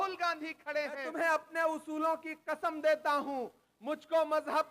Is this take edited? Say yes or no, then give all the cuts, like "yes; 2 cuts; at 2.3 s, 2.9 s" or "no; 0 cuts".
yes; 1 cut; at 1.0 s